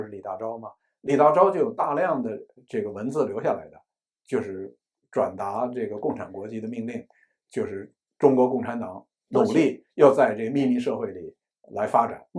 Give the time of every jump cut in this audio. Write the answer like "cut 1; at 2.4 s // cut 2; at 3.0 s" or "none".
none